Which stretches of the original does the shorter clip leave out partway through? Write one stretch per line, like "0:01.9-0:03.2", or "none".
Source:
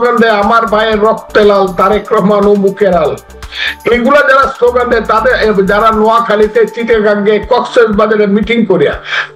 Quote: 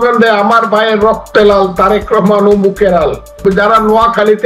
0:03.4-0:05.5